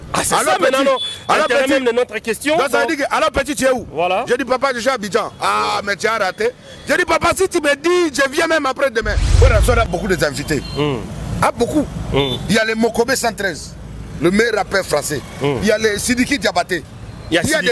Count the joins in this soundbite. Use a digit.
1